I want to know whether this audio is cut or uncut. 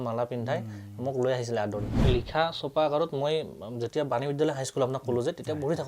cut